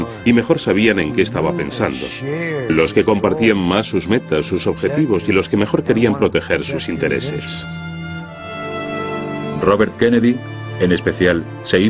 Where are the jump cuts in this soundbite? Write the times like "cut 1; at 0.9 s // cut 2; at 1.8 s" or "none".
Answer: cut 1; at 5.1 s